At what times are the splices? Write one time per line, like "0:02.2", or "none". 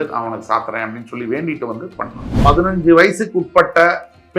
0:02.2